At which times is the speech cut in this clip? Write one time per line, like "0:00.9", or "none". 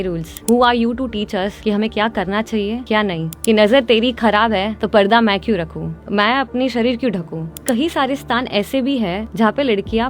0:01.6
0:03.0
0:04.8
0:06.0
0:07.6
0:09.2